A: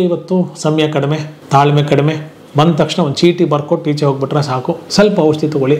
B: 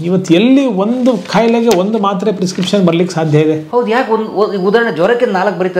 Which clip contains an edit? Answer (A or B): A